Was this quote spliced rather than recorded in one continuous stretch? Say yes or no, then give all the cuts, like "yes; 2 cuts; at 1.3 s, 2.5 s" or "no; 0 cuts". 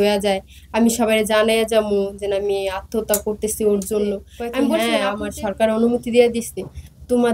yes; 1 cut; at 4.3 s